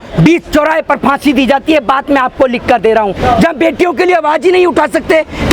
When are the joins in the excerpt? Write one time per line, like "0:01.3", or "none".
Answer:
0:03.2